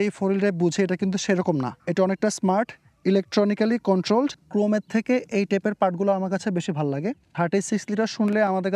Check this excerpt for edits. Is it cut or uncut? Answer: cut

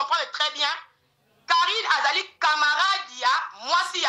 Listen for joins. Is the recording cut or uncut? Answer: uncut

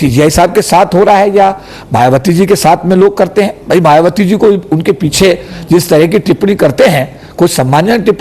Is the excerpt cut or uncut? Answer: uncut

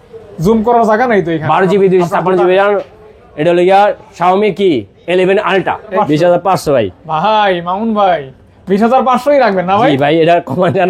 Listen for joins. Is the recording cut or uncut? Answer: cut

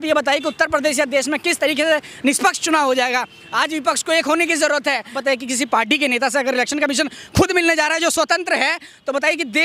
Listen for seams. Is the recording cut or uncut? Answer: cut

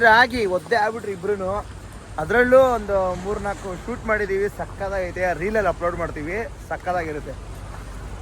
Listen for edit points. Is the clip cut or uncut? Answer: uncut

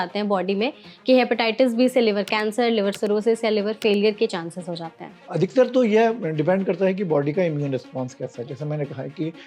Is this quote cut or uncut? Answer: cut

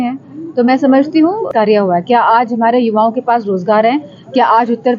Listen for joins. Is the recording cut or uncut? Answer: cut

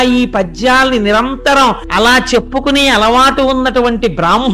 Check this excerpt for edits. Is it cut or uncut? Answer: cut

